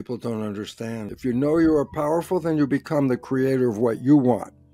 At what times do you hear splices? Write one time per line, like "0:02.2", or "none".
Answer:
0:01.1